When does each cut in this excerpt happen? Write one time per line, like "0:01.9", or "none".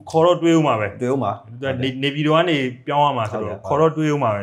none